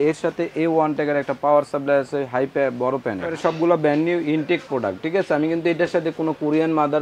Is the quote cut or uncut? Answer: cut